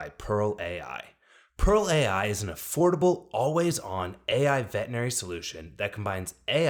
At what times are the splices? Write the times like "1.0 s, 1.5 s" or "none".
none